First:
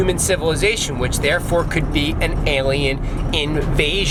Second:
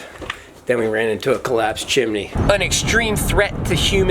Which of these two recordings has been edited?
second; 1 cut; at 2.3 s

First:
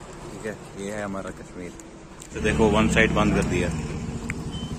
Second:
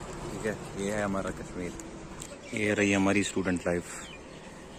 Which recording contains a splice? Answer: second; 1 cut; at 2.1 s

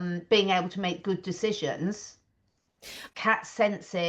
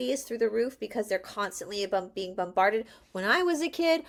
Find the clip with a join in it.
first; 1 cut; at 3.0 s

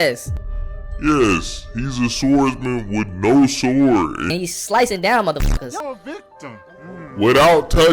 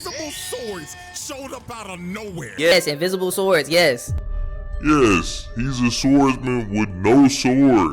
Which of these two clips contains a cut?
second; 1 cut; at 2.5 s

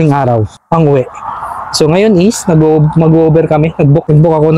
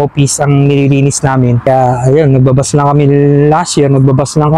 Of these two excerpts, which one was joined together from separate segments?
second; 1 cut; at 1.6 s

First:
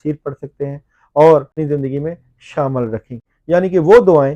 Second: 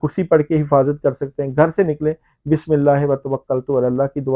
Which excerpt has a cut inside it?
first; 1 cut; at 1.6 s

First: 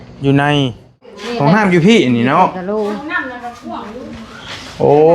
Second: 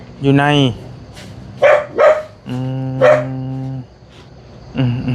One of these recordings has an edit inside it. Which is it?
first; 1 cut; at 1.2 s

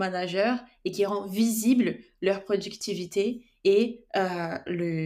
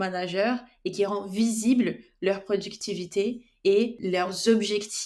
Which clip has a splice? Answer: second; 1 cut; at 4.0 s

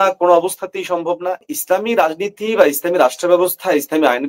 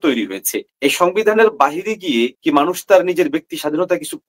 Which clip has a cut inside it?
first; 1 cut; at 1.5 s

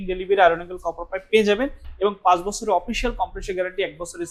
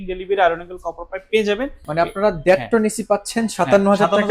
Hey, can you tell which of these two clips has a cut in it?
second; 1 cut; at 1.8 s

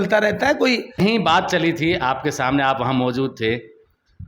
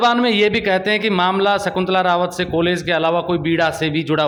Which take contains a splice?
first; 1 cut; at 1.0 s

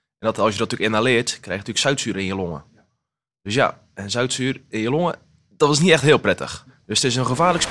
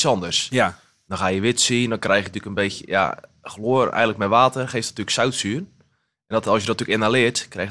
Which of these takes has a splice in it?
first; 1 cut; at 6.5 s

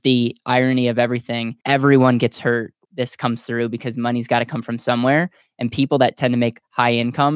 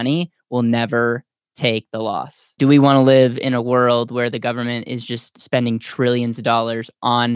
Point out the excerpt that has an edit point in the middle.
second; 1 cut; at 2.5 s

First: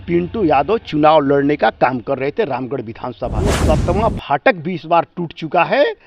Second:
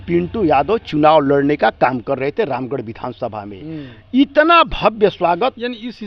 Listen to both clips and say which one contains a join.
first; 1 cut; at 3.6 s

